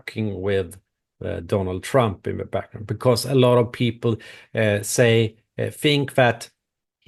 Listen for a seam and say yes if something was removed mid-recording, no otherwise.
no